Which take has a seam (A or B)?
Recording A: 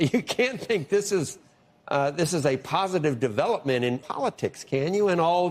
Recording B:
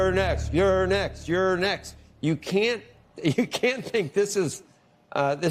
A